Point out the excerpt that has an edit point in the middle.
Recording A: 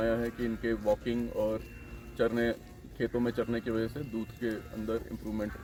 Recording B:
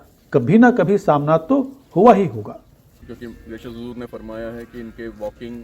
B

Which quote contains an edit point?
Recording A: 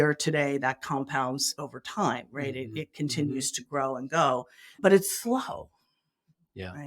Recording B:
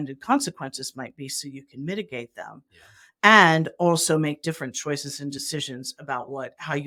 A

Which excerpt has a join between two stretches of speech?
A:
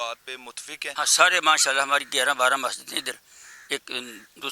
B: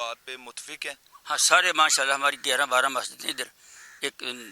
A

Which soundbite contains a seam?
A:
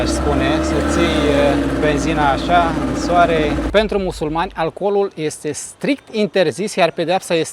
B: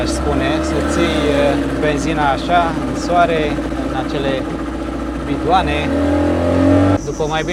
A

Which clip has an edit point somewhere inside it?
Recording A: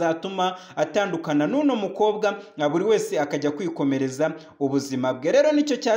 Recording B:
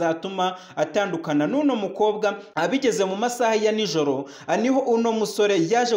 B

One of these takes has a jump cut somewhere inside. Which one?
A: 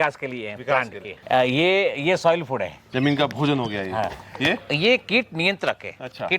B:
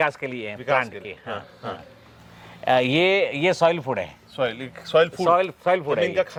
A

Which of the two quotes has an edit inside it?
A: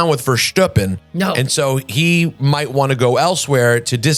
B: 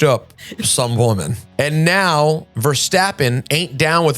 B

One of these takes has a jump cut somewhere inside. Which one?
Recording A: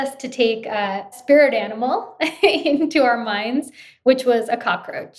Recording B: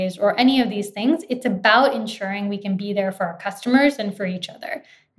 A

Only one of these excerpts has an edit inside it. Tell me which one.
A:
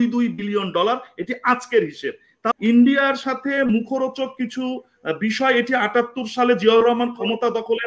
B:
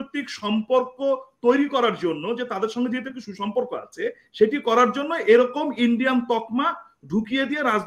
A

